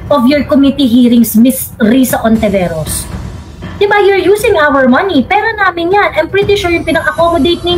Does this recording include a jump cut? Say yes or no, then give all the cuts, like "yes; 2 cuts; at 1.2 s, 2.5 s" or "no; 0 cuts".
no; 0 cuts